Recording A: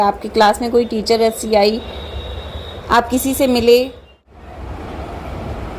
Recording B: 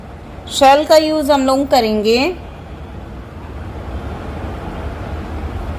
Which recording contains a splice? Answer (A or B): A